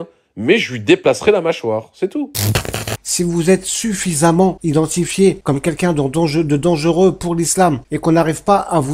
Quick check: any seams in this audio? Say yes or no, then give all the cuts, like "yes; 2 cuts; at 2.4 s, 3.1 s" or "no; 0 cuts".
yes; 4 cuts; at 2.7 s, 4.6 s, 5.4 s, 7.9 s